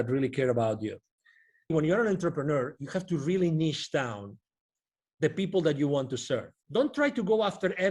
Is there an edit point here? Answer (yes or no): yes